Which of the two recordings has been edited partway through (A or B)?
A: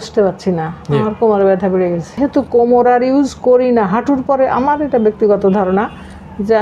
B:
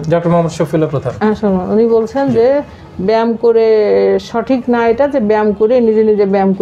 A